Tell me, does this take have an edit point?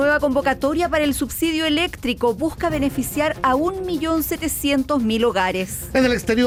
no; 0 cuts

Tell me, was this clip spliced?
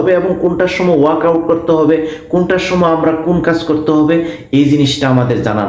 no; 0 cuts

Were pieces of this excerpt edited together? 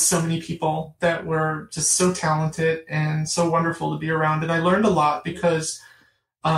no; 0 cuts

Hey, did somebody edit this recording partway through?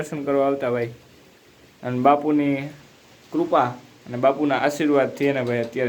no; 0 cuts

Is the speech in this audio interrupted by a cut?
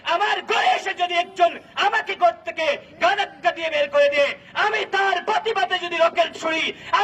no; 0 cuts

